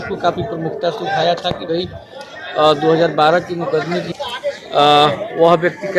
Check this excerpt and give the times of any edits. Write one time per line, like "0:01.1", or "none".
0:04.1